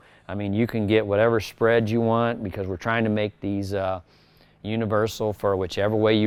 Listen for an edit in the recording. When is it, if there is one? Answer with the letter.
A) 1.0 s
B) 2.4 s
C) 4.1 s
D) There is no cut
D